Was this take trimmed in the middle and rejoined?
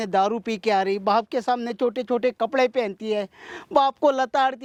no; 0 cuts

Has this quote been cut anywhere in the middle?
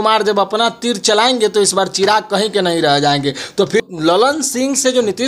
yes; 1 cut; at 3.8 s

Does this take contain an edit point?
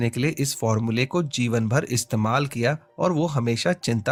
no; 0 cuts

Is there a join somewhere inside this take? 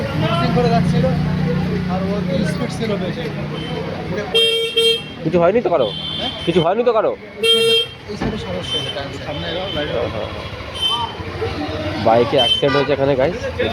no; 0 cuts

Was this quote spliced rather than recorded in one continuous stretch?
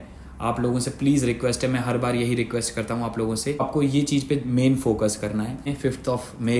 yes; 2 cuts; at 3.6 s, 5.7 s

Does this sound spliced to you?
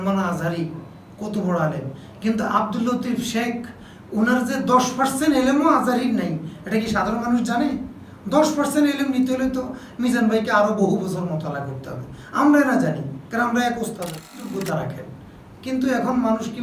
yes; 1 cut; at 14.5 s

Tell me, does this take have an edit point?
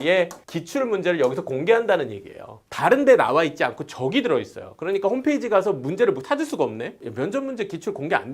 yes; 1 cut; at 7.0 s

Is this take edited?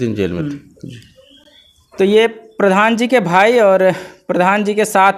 no; 0 cuts

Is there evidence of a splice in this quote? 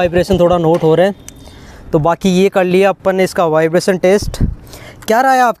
no; 0 cuts

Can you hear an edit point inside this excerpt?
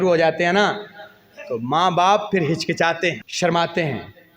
yes; 1 cut; at 3.3 s

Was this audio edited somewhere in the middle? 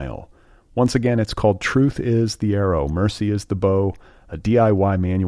no; 0 cuts

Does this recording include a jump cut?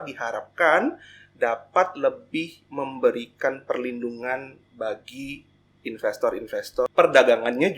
yes; 1 cut; at 6.9 s

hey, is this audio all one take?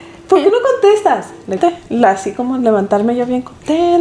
no; 1 cut; at 1.6 s

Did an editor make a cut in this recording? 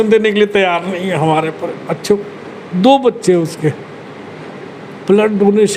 no; 0 cuts

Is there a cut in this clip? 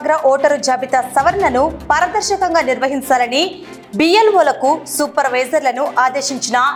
no; 0 cuts

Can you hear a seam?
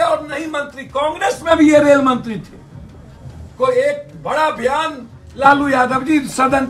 no; 0 cuts

